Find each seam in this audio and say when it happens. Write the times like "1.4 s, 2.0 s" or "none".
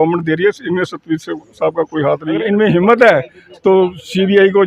2.4 s